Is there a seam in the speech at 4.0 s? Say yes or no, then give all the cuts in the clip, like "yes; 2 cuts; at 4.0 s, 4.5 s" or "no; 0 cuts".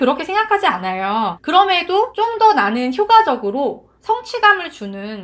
no; 2 cuts; at 1.4 s, 2.1 s